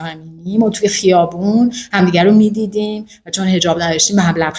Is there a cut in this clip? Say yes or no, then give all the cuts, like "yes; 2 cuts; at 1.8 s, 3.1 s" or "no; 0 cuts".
no; 0 cuts